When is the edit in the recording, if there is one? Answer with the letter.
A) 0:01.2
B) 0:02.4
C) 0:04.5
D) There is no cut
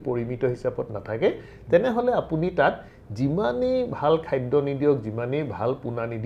D